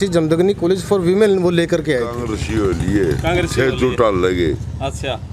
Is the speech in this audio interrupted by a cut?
yes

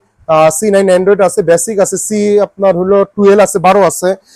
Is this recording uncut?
yes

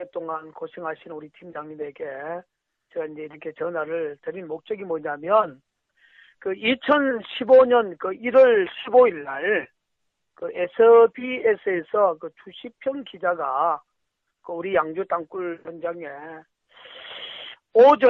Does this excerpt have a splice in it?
no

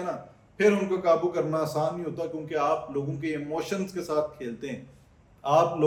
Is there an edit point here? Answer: no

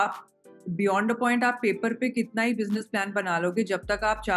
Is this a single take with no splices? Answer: yes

